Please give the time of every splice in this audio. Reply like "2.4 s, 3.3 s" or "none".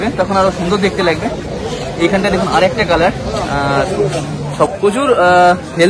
4.7 s